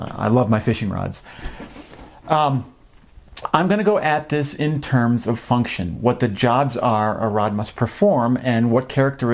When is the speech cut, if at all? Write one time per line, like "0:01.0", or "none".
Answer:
0:07.9